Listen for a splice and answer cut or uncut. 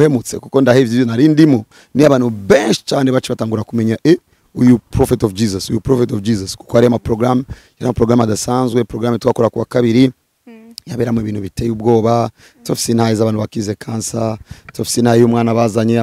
cut